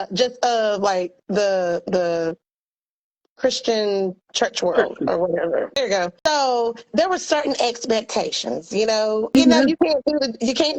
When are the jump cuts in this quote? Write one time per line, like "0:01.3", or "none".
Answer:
0:05.7
0:09.3